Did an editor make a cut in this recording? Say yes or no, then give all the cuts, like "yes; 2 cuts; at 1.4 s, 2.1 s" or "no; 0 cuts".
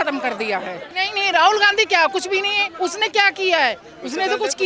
yes; 1 cut; at 1.0 s